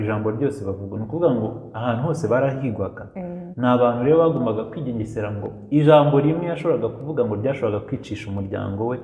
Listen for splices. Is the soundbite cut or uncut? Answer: uncut